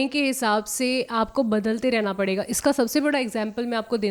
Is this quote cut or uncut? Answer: uncut